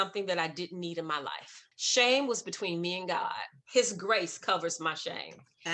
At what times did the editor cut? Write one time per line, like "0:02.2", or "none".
none